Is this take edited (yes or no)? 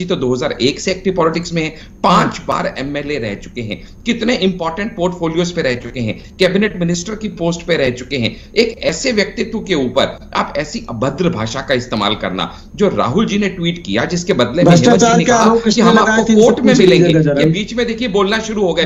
no